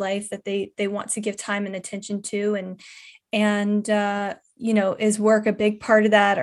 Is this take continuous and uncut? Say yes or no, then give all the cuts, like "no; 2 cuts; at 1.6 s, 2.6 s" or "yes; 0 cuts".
yes; 0 cuts